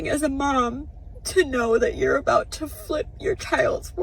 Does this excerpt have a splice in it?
no; 0 cuts

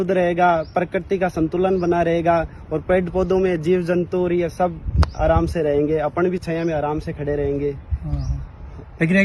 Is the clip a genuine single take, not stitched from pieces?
yes; 0 cuts

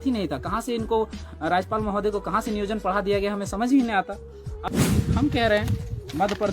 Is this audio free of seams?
no; 1 cut; at 4.6 s

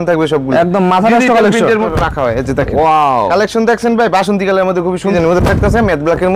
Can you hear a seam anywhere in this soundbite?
yes; 2 cuts; at 1.9 s, 5.1 s

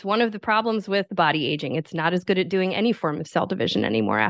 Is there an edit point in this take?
yes; 1 cut; at 1.1 s

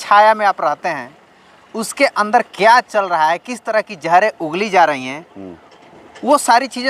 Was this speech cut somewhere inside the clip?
no; 0 cuts

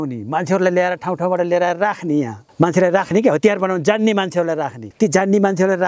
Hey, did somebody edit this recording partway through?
yes; 2 cuts; at 2.4 s, 4.8 s

